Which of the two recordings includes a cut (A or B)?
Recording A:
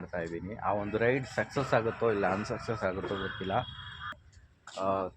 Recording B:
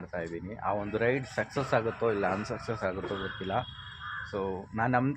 A